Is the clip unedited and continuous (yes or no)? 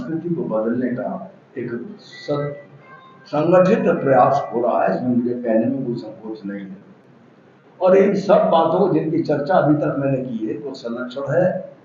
yes